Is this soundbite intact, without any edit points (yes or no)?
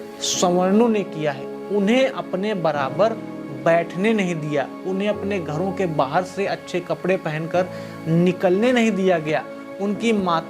yes